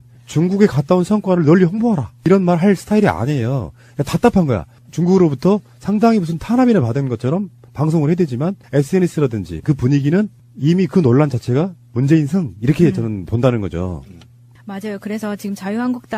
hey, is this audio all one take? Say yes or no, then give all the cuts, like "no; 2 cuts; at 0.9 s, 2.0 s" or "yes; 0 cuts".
no; 1 cut; at 1.1 s